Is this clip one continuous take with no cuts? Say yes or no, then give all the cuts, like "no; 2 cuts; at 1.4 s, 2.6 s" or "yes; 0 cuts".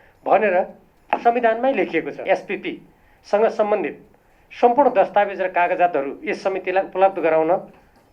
no; 1 cut; at 2.2 s